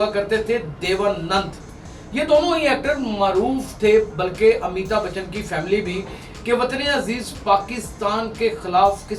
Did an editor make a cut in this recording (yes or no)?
no